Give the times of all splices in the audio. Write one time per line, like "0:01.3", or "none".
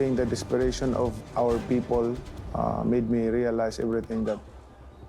0:01.1